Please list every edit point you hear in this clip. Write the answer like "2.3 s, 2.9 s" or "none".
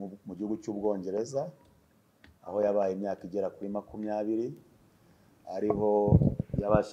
none